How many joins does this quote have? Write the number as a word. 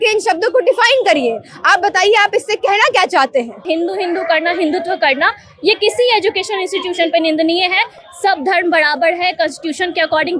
one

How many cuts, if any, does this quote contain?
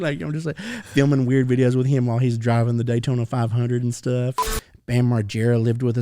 one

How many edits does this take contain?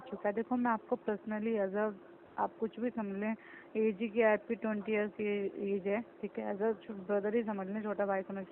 zero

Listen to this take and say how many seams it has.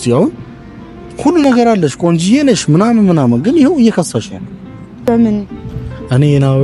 one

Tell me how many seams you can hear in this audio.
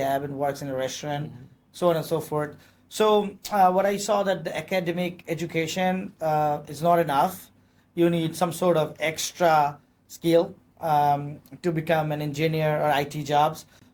zero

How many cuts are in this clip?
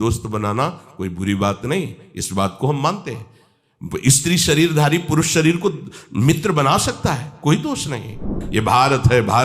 one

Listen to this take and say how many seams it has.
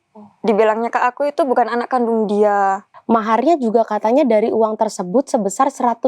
one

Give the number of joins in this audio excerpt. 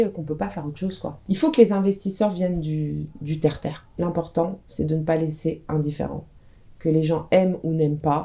two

